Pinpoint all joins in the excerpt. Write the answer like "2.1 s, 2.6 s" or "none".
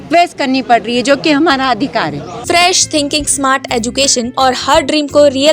2.3 s, 4.3 s